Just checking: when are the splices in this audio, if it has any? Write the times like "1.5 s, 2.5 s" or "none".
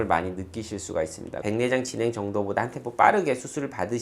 1.4 s